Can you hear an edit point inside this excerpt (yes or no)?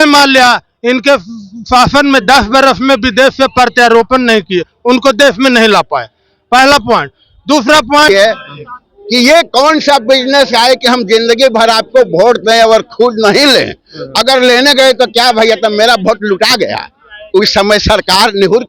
yes